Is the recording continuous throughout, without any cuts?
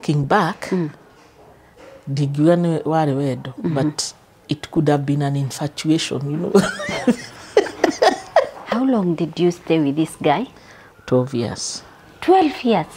no; 1 cut; at 8.6 s

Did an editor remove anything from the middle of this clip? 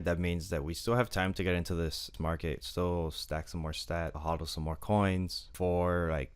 yes; 3 cuts; at 2.1 s, 4.2 s, 5.4 s

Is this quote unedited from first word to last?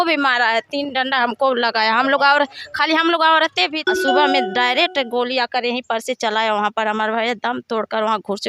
no; 1 cut; at 3.8 s

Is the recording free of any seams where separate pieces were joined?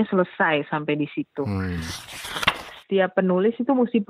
no; 1 cut; at 2.2 s

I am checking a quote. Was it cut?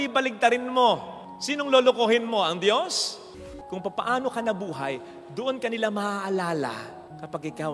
yes; 1 cut; at 3.4 s

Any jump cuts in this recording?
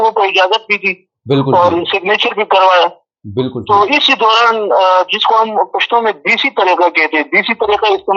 no; 0 cuts

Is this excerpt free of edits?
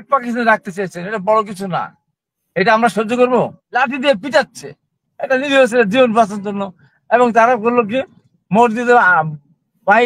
no; 1 cut; at 3.6 s

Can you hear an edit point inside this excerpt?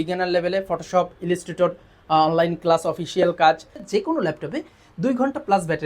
yes; 1 cut; at 3.9 s

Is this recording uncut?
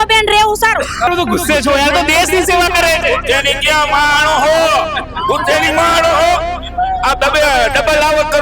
no; 1 cut; at 1.1 s

